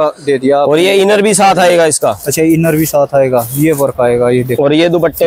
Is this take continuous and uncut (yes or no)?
yes